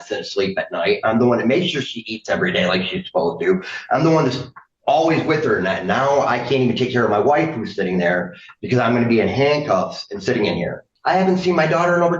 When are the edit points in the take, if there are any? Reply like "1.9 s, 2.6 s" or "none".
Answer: 10.9 s